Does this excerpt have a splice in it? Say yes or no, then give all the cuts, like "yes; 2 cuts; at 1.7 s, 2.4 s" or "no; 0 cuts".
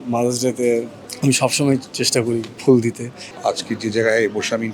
yes; 2 cuts; at 2.5 s, 3.3 s